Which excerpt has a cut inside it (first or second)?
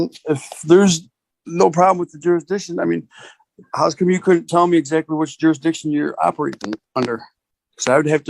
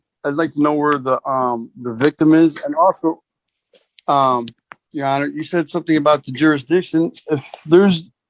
first